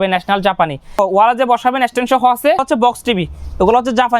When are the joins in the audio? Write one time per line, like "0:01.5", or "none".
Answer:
0:01.0
0:02.6